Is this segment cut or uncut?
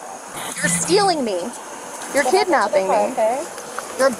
uncut